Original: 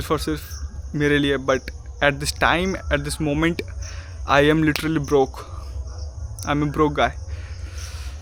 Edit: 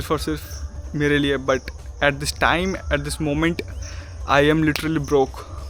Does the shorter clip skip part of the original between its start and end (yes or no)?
no